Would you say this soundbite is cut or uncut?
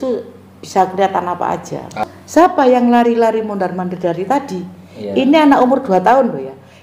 cut